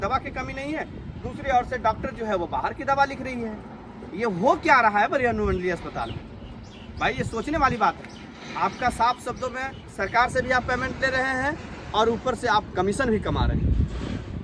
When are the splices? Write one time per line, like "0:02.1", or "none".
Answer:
none